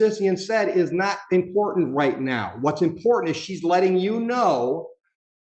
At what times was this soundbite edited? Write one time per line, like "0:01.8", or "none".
none